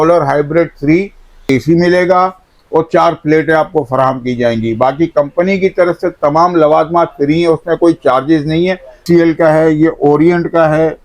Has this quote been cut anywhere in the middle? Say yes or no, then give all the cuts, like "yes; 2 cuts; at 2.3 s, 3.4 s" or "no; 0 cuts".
yes; 2 cuts; at 1.4 s, 9.0 s